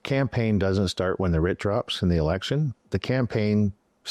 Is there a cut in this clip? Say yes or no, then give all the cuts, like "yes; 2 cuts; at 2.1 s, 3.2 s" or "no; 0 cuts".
no; 0 cuts